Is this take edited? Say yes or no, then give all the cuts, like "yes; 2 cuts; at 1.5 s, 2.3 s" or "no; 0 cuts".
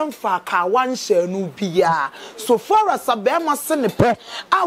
no; 0 cuts